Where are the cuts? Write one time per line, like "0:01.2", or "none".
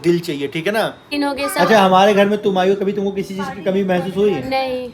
0:01.1